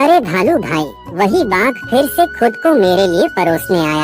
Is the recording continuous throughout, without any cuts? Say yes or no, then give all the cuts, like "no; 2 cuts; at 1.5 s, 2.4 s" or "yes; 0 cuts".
no; 1 cut; at 1.0 s